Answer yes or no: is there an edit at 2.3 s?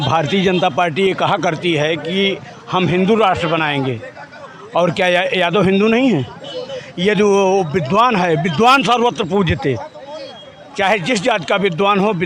no